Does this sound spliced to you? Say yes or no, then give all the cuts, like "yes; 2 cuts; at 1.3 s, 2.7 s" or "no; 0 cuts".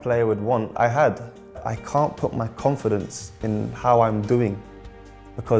yes; 1 cut; at 1.6 s